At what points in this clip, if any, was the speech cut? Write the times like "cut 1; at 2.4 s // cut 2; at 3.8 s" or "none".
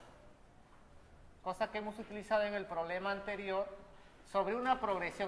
none